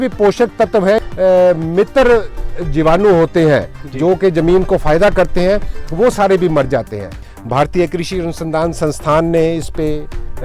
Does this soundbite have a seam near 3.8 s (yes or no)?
no